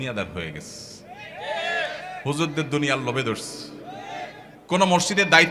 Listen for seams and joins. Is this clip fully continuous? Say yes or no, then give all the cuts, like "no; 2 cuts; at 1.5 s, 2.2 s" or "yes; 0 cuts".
no; 1 cut; at 4.5 s